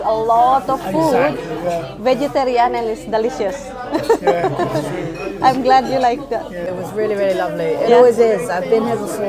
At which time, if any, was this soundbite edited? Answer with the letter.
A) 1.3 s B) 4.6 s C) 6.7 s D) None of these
C